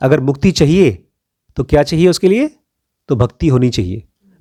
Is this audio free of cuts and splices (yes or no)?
yes